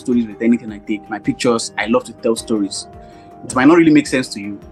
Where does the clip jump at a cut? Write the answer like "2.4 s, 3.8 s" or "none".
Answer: none